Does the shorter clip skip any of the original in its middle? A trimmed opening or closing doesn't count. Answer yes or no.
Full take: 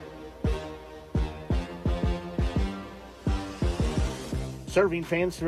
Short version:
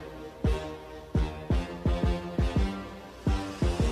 no